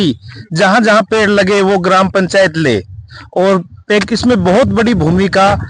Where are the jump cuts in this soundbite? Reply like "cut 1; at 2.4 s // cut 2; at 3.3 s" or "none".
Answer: none